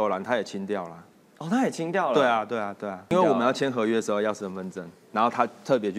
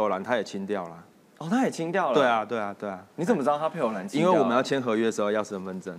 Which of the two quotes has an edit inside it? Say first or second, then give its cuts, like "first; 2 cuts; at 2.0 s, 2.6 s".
first; 1 cut; at 3.1 s